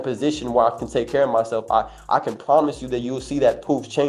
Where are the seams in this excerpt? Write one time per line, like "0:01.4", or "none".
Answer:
none